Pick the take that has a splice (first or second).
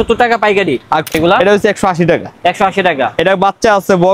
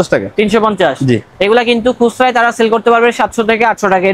first